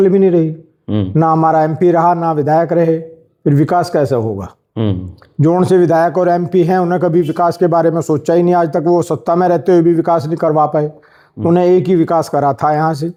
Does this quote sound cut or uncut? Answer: uncut